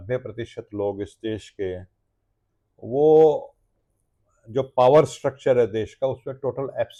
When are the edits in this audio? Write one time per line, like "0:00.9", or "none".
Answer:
none